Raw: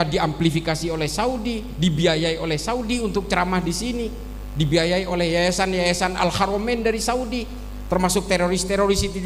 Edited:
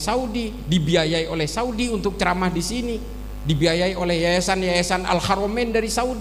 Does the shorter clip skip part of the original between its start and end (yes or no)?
no